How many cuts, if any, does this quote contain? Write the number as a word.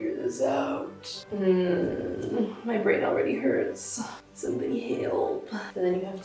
zero